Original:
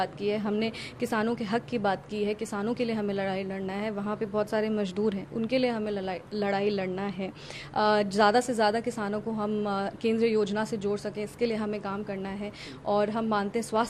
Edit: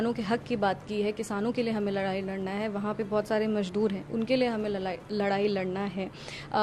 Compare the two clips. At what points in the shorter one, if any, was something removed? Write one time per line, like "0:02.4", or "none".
none